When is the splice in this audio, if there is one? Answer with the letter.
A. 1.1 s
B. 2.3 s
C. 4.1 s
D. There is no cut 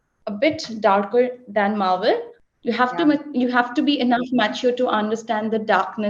B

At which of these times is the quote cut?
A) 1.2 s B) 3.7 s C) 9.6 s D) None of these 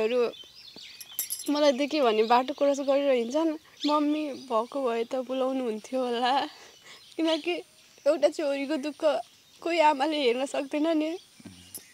B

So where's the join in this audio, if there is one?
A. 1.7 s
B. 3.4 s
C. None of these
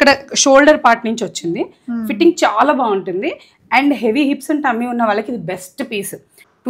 C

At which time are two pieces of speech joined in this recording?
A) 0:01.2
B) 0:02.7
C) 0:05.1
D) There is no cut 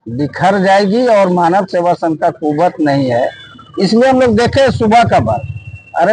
D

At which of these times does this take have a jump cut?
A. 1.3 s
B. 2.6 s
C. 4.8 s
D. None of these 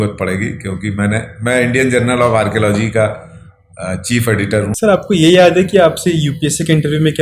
C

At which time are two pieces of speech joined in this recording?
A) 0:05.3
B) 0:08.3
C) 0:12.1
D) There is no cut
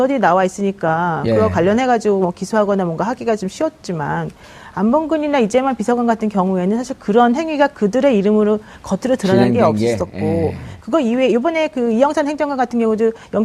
A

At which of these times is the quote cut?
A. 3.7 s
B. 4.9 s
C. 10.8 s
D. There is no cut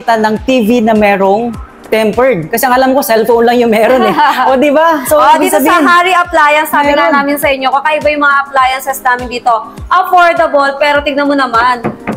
D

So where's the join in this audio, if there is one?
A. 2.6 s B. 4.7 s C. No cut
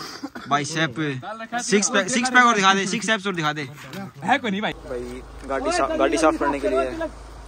B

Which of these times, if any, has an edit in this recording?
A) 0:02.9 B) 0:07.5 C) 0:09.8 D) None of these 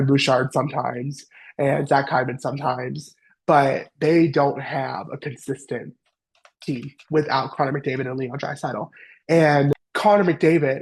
C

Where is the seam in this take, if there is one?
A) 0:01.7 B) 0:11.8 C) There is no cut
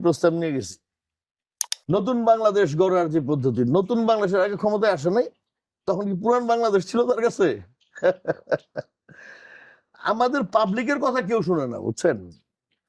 A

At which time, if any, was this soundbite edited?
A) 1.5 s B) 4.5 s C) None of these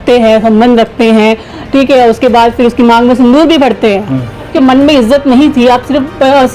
B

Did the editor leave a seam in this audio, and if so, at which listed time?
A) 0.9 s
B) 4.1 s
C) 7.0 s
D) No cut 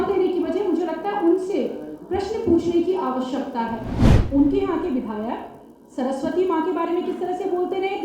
B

